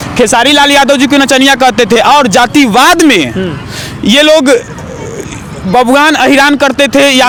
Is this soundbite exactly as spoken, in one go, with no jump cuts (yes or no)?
yes